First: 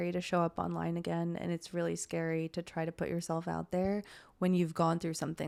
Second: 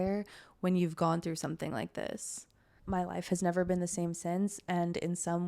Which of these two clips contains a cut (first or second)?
second